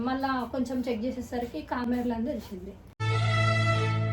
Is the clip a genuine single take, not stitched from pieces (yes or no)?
yes